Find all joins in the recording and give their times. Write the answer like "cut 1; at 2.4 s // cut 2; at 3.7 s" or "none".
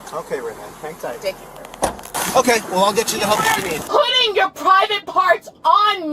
cut 1; at 2.1 s